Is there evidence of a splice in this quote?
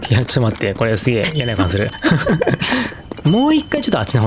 yes; 1 cut; at 3.0 s

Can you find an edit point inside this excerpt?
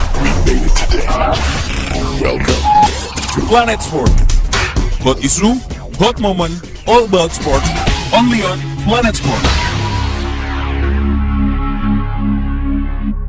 no; 0 cuts

